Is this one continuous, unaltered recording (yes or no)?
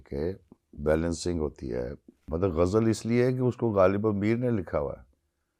no